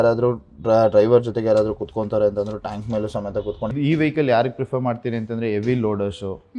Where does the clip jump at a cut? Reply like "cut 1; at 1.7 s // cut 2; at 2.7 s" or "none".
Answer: cut 1; at 3.7 s